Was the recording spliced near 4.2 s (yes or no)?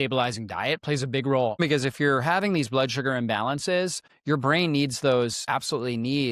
no